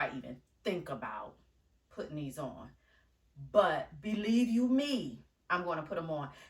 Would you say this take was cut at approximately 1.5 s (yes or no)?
no